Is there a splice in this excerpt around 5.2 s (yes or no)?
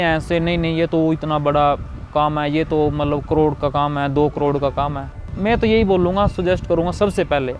yes